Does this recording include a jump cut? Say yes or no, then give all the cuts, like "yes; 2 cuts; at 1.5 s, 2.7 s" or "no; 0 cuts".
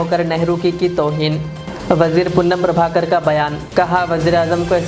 no; 0 cuts